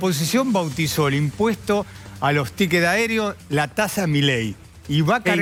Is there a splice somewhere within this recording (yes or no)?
no